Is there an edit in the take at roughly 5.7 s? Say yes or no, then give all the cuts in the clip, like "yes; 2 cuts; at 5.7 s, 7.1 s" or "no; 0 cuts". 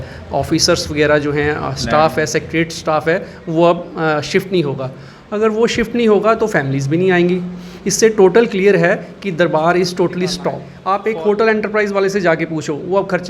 no; 1 cut; at 10.7 s